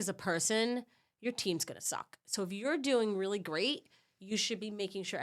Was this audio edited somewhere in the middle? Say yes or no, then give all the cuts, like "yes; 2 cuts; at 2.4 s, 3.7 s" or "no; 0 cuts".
no; 0 cuts